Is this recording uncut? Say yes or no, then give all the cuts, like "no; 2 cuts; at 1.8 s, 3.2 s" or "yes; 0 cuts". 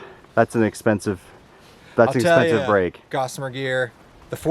yes; 0 cuts